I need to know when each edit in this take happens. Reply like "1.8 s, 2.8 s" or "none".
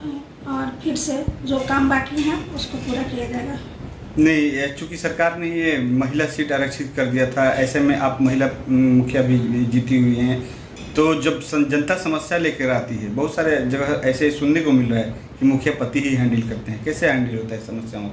none